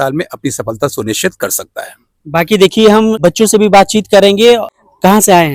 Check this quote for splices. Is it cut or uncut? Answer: uncut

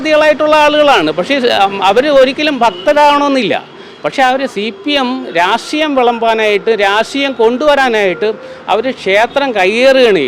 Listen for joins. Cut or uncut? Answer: uncut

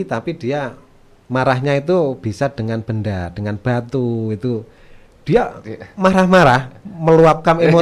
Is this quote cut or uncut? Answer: uncut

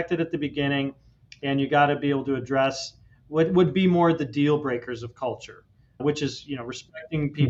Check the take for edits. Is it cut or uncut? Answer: uncut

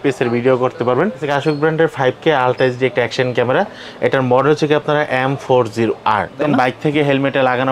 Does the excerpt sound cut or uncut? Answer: cut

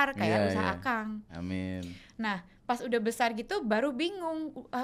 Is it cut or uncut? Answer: uncut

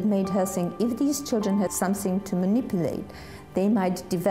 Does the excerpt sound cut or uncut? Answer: cut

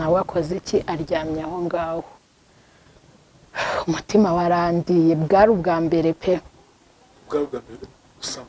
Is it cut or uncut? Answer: uncut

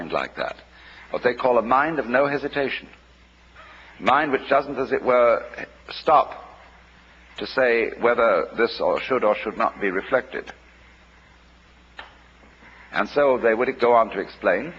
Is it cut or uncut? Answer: cut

